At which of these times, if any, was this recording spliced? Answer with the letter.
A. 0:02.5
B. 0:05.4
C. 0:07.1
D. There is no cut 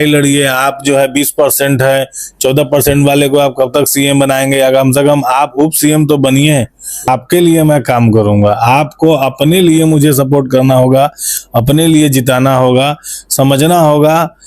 C